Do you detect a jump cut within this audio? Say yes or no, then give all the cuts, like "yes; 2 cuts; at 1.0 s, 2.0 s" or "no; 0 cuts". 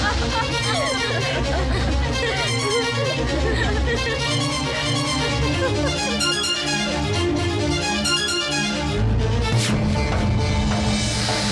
no; 0 cuts